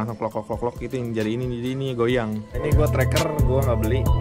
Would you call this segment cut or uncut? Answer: cut